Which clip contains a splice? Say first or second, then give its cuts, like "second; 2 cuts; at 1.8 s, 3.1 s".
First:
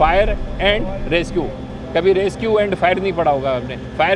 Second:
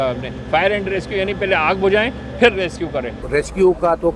second; 1 cut; at 3.2 s